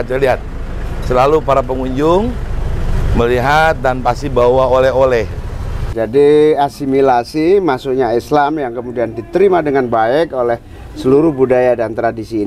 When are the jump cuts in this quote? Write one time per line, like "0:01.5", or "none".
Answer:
0:05.9